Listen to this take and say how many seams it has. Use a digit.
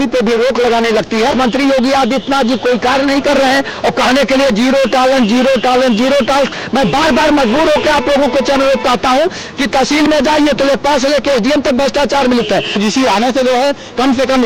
2